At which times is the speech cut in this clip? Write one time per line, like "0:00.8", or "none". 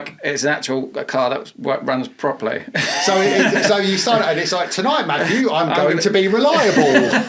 none